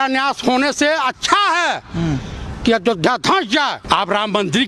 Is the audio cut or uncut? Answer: cut